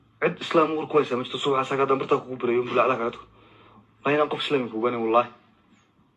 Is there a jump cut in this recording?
yes; 1 cut; at 3.9 s

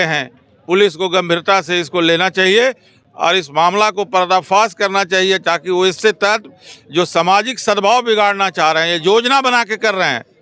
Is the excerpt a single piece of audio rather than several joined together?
yes; 0 cuts

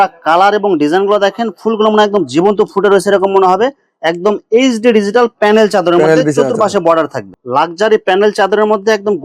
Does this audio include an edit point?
yes; 1 cut; at 7.3 s

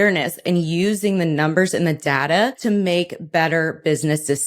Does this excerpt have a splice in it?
yes; 1 cut; at 2.6 s

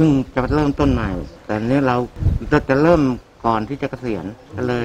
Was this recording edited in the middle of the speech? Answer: no; 0 cuts

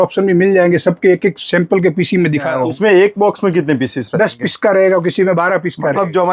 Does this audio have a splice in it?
yes; 1 cut; at 2.5 s

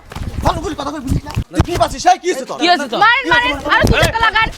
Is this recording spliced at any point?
yes; 1 cut; at 1.4 s

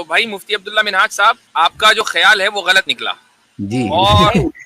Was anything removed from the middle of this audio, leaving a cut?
yes; 1 cut; at 1.4 s

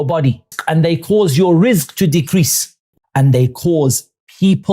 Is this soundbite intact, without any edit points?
no; 1 cut; at 2.9 s

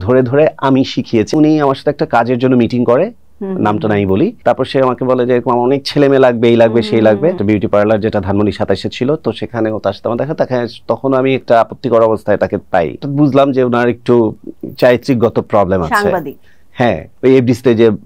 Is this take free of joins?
no; 5 cuts; at 1.3 s, 4.4 s, 7.4 s, 13.0 s, 17.1 s

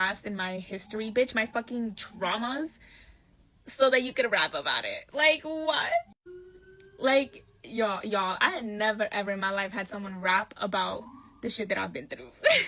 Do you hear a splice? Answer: no; 0 cuts

